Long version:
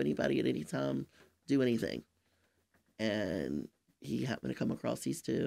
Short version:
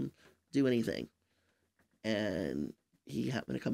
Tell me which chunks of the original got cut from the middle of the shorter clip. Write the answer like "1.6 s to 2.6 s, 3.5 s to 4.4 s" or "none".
none